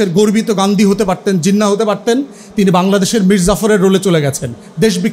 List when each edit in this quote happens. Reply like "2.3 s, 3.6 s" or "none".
none